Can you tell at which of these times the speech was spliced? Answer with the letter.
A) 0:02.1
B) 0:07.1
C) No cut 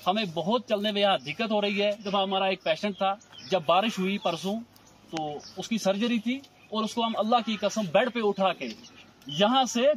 A